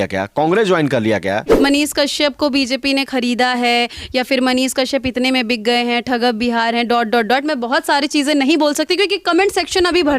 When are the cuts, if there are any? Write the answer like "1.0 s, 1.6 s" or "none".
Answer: 1.5 s